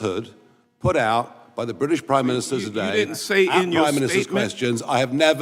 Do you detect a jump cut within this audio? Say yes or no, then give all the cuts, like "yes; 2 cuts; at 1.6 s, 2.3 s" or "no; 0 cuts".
no; 0 cuts